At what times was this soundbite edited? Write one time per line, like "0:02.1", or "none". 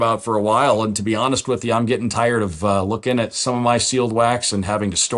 none

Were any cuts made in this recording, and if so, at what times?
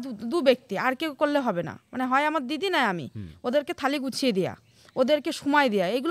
none

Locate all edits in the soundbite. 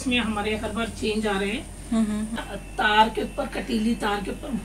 0:02.4

